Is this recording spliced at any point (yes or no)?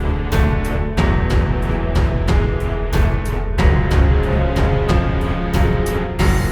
no